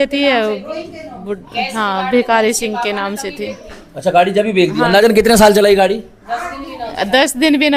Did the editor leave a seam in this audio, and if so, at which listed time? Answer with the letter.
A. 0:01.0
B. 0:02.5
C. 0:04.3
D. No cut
D